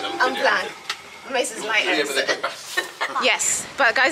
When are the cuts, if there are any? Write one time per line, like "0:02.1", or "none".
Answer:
0:03.2